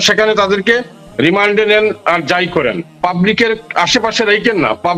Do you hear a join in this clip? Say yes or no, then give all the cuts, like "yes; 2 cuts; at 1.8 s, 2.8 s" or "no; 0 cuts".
no; 0 cuts